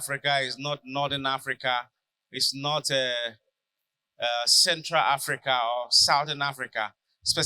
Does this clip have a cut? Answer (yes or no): no